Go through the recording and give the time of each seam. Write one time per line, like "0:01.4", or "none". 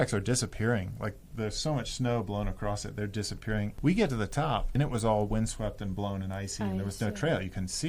0:03.7
0:04.7